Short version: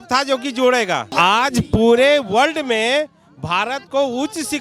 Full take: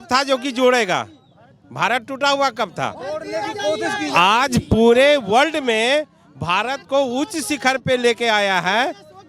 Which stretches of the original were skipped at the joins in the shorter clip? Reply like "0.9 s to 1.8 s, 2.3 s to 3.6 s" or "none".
1.1 s to 4.1 s

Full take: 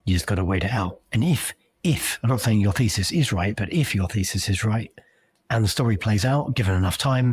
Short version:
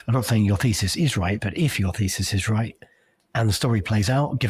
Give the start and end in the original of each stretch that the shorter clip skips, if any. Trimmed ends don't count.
none

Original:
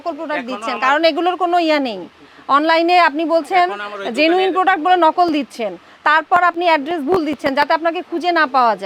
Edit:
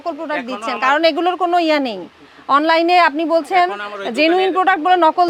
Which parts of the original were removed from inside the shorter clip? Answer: none

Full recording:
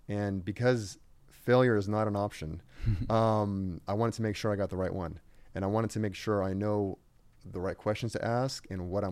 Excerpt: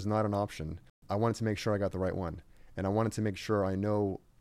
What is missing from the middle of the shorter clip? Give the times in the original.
2.8 s to 3.7 s

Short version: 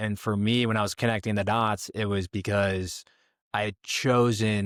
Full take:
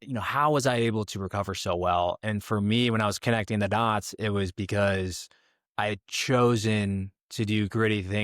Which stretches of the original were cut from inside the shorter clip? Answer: none

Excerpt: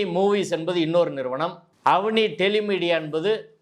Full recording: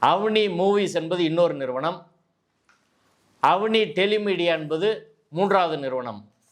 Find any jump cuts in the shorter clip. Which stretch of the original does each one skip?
2.1 s to 3.2 s

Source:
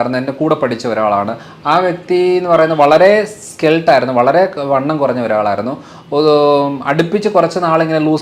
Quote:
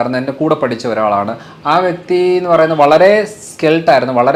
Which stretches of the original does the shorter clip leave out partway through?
none

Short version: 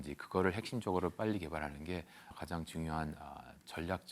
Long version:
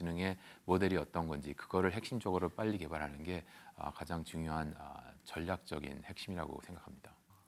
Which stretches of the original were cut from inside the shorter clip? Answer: 3.8 s to 4.0 s

